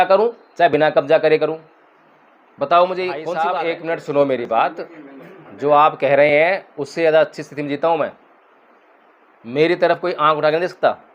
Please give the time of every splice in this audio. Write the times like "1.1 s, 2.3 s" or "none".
3.3 s